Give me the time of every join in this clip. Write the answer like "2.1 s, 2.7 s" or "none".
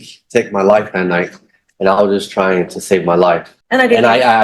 3.5 s